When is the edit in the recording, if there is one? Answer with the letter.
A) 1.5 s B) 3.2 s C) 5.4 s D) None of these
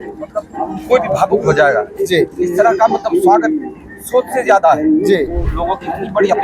C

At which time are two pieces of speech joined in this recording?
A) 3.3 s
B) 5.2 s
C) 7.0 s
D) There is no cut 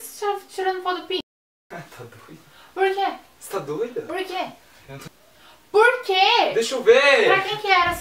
B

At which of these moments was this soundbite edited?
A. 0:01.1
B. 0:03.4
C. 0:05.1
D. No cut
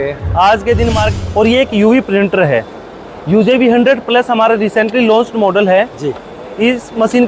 A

